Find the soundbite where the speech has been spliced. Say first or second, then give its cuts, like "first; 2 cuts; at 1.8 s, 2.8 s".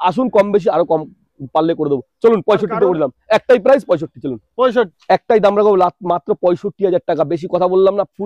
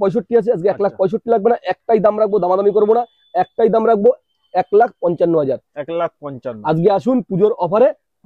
first; 1 cut; at 4.9 s